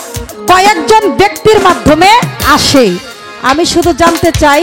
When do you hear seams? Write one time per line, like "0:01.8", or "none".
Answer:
none